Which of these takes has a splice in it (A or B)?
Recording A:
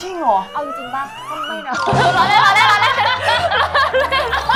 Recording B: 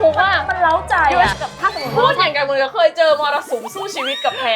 B